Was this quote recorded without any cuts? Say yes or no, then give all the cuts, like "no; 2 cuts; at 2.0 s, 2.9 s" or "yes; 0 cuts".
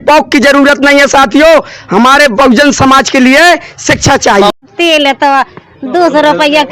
no; 1 cut; at 4.5 s